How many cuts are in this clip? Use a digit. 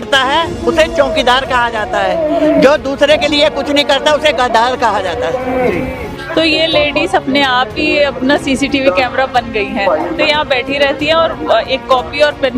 1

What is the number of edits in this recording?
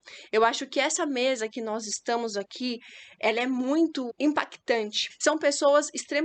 2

